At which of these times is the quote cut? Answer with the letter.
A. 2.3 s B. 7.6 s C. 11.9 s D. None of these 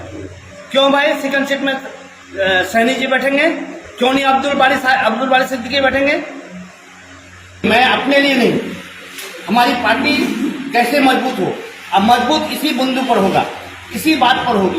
B